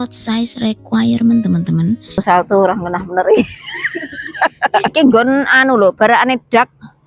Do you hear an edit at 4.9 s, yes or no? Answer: yes